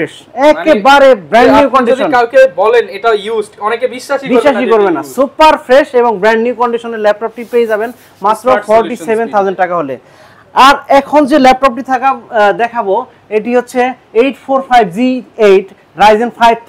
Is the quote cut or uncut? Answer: uncut